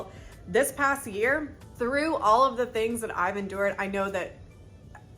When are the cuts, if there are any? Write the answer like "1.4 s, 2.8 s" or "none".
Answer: 1.6 s

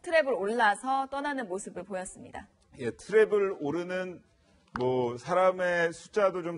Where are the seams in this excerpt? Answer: none

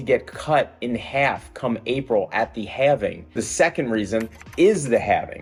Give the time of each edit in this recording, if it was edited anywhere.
none

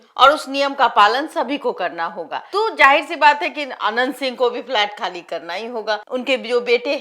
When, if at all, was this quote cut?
2.4 s, 6.0 s

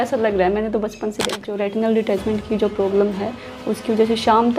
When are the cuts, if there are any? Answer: 1.5 s

